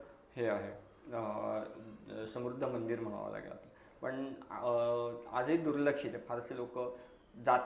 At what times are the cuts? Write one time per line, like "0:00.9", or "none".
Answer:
none